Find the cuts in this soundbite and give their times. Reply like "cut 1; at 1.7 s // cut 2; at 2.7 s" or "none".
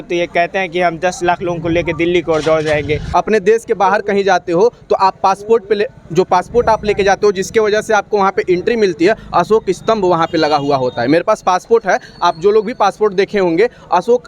cut 1; at 3.0 s